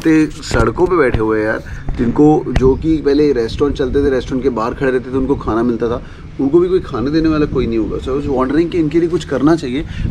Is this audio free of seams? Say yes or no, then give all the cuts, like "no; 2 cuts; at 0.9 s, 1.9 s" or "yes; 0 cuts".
yes; 0 cuts